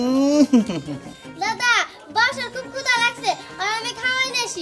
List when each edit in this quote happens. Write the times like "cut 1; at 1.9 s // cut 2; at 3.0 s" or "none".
none